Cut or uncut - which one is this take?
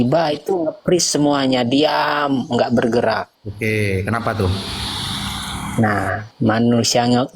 cut